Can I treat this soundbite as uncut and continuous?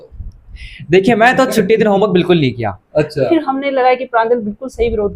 no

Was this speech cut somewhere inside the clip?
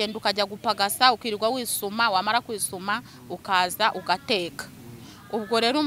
no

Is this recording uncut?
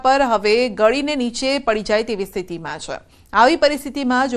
no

